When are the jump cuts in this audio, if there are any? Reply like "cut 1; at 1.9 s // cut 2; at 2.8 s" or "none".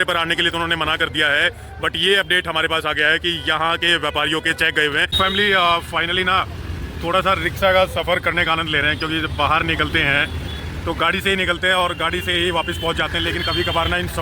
cut 1; at 5.1 s